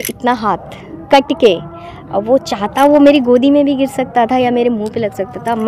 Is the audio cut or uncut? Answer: uncut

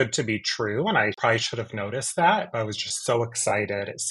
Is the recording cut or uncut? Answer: cut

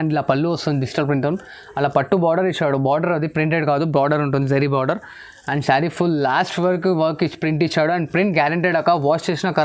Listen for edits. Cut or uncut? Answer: uncut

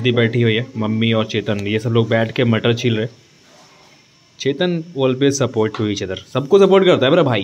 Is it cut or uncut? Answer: uncut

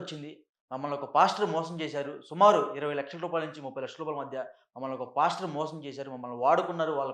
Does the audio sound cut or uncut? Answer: uncut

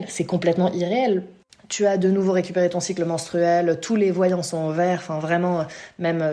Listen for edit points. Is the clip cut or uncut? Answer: cut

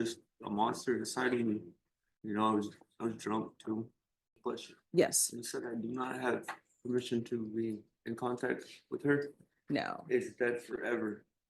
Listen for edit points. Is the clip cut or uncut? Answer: cut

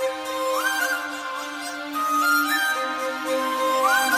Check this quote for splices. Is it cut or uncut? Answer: cut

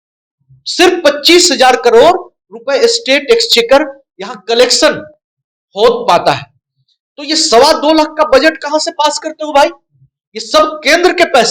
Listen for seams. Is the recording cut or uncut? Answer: uncut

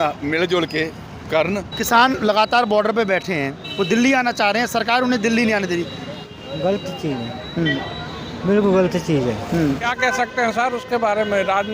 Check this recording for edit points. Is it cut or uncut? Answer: cut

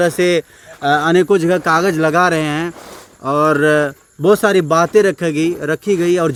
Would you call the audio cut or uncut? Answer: uncut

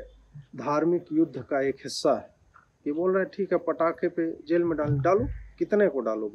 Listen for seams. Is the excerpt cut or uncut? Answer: uncut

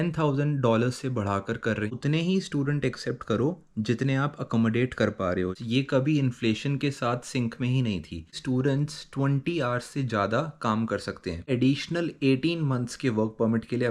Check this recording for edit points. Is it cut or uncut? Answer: cut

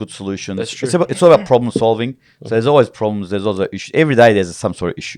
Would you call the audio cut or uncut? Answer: uncut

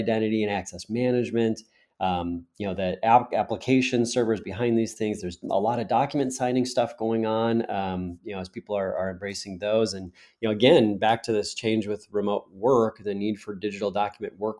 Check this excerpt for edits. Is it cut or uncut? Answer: uncut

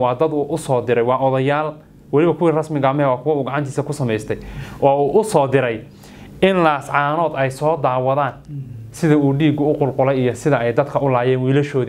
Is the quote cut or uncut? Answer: uncut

